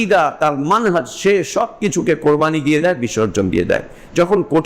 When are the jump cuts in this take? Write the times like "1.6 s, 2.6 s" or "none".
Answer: none